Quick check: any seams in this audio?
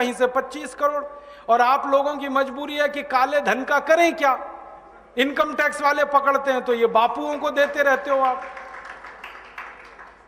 no; 0 cuts

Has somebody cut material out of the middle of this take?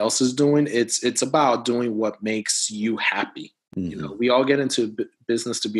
no; 0 cuts

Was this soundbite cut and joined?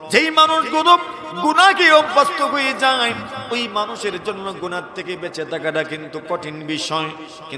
no; 0 cuts

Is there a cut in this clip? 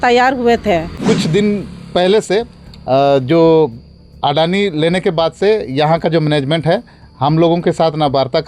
yes; 1 cut; at 1.0 s

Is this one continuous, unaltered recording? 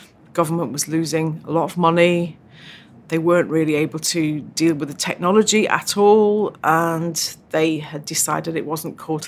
yes; 0 cuts

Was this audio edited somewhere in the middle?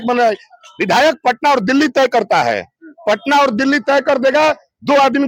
no; 0 cuts

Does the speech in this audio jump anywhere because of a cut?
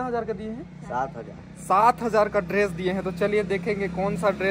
no; 0 cuts

